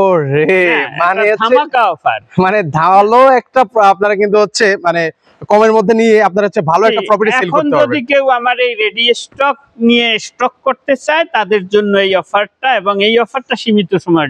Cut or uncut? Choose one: uncut